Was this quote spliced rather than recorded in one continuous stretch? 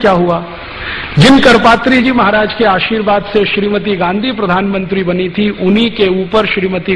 yes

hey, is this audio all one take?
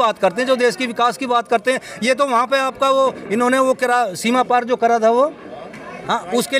yes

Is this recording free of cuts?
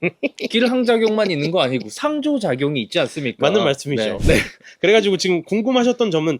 no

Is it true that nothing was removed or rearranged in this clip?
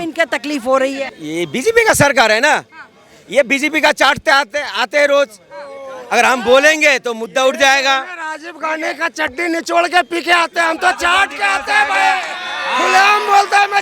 no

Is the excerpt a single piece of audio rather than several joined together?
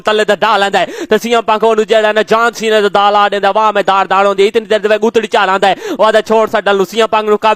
yes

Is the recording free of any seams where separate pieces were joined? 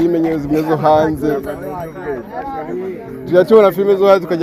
yes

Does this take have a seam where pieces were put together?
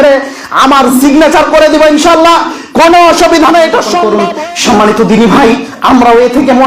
yes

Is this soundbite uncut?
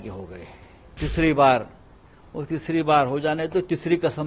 no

